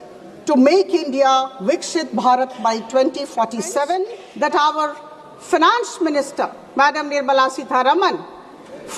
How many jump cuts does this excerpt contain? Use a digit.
1